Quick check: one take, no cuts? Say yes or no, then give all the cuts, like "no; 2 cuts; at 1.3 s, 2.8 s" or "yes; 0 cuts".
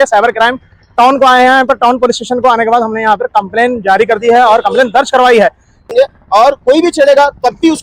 no; 1 cut; at 5.9 s